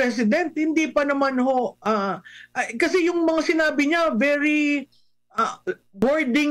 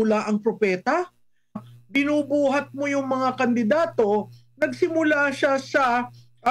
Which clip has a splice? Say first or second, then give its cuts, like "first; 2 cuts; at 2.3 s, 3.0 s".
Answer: second; 1 cut; at 1.6 s